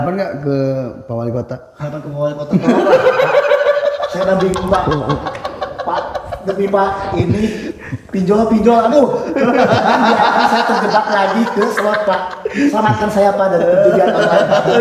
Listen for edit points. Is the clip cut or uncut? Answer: uncut